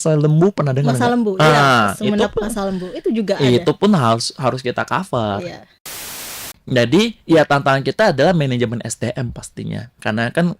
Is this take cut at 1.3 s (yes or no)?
no